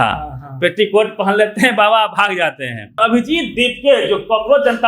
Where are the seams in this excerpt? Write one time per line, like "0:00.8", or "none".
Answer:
0:03.0